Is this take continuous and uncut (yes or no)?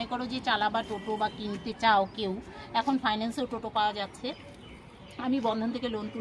yes